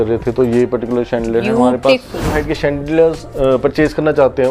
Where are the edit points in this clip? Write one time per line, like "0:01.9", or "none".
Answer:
0:02.3